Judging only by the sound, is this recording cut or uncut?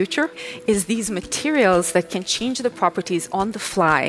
uncut